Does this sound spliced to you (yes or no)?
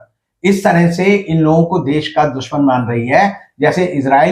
no